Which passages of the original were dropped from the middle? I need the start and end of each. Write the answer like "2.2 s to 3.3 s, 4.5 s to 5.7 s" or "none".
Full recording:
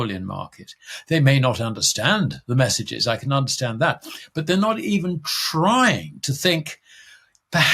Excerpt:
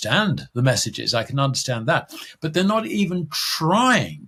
none